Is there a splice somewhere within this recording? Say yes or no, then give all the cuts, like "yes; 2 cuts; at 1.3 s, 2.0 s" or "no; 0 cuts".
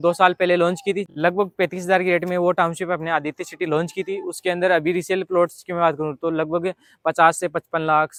no; 0 cuts